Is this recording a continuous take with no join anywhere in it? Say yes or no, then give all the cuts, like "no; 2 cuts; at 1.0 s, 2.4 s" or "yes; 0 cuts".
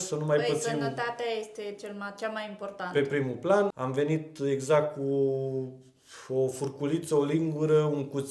no; 1 cut; at 3.8 s